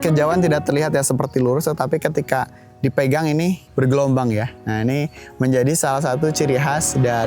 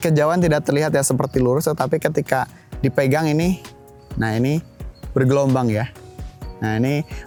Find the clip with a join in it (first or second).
first